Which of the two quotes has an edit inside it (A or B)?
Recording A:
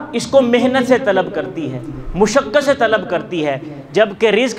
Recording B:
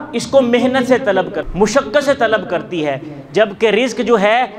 B